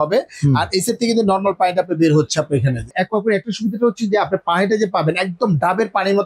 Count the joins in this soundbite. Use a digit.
1